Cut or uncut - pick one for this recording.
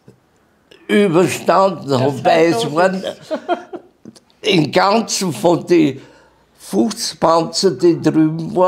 uncut